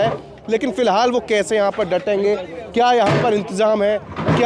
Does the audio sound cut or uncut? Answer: uncut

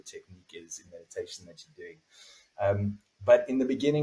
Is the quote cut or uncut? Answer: uncut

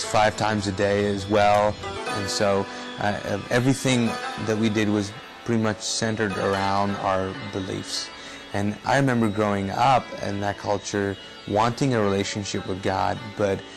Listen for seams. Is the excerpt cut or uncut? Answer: cut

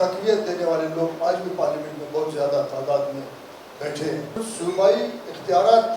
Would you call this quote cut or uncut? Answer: cut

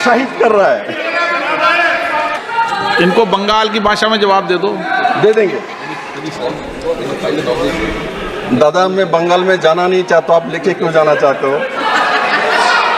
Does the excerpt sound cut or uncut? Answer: cut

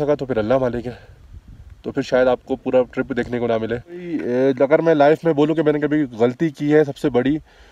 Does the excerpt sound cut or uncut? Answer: cut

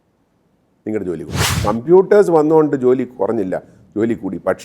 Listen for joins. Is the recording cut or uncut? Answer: cut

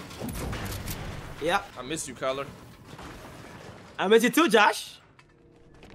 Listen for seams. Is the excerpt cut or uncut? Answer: cut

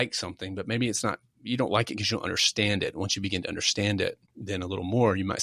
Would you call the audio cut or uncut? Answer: cut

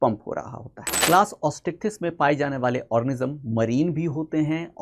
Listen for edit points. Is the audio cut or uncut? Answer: cut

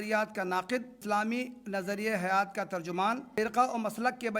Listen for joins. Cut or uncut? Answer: cut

